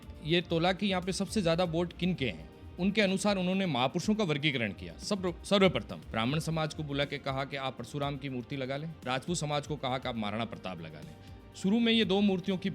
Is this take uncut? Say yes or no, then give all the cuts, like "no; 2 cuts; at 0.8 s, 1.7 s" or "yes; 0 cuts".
no; 2 cuts; at 6.0 s, 9.0 s